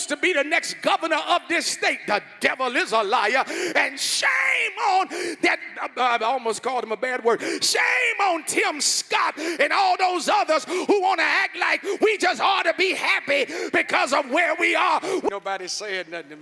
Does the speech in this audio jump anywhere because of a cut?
yes; 1 cut; at 15.3 s

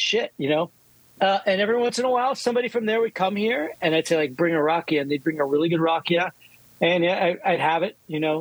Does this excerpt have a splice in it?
no; 0 cuts

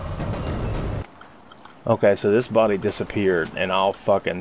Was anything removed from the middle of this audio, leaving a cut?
yes; 1 cut; at 1.0 s

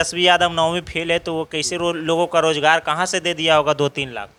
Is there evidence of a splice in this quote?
no; 0 cuts

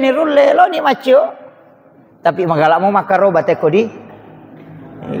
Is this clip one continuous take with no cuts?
yes; 0 cuts

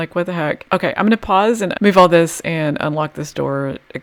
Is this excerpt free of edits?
yes; 0 cuts

